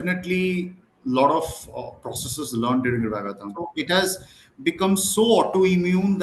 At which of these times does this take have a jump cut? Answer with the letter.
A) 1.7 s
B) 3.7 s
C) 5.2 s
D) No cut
B